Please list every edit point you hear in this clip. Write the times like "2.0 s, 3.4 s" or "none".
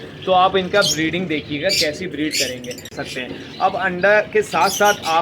3.0 s